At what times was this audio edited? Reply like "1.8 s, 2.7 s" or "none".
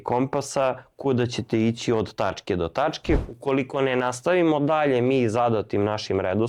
3.2 s